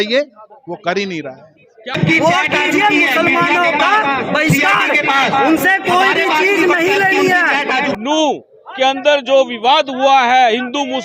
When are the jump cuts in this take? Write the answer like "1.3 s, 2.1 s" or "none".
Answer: 2.0 s, 7.9 s